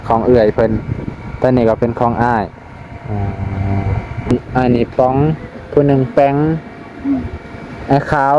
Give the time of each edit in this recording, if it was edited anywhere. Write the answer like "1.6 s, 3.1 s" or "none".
4.3 s